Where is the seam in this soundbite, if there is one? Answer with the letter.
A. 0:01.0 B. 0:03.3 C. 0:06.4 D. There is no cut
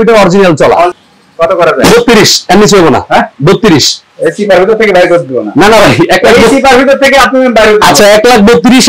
A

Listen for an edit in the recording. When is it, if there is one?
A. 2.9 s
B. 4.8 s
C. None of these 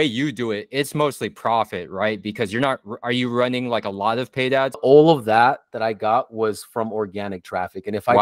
B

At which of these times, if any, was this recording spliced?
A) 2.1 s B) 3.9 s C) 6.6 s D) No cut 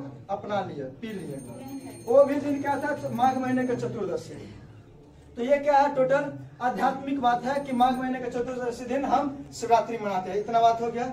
D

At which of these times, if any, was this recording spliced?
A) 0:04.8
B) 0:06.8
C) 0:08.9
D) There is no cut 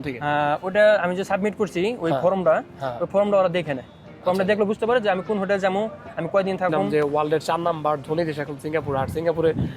B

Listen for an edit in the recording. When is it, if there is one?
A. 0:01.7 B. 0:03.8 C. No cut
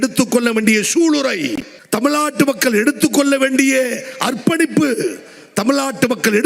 A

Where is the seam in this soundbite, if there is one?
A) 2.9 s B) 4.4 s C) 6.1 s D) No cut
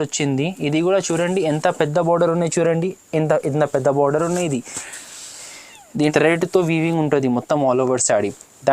C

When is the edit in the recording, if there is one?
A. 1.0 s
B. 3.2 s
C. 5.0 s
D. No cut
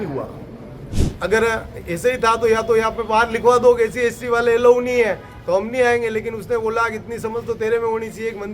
A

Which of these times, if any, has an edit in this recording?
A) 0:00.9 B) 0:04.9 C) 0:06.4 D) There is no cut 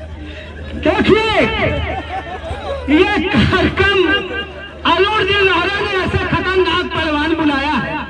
D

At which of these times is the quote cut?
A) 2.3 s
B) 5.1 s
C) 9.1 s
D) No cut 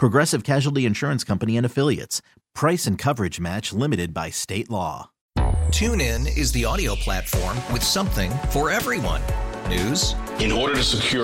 B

